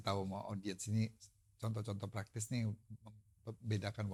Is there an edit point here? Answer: no; 0 cuts

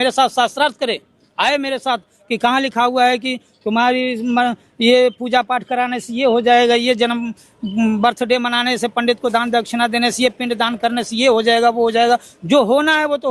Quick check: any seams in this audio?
no; 0 cuts

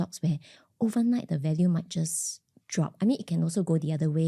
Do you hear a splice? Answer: no; 0 cuts

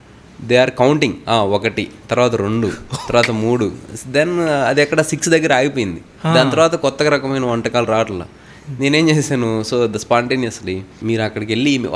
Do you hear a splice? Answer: yes; 1 cut; at 10.9 s

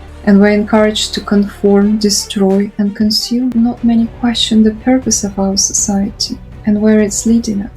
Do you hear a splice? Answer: yes; 1 cut; at 3.5 s

